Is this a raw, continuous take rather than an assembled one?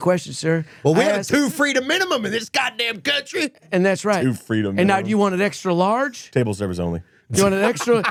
yes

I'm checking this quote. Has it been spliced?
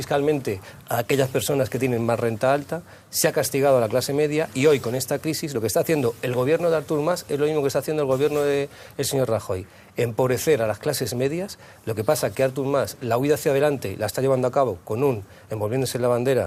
no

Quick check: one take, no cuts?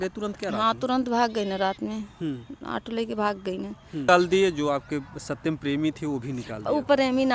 no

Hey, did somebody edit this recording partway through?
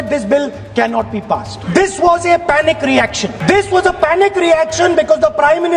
yes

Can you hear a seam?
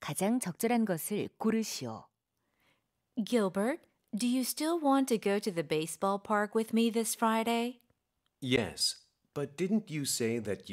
no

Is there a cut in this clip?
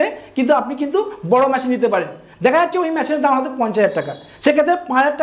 no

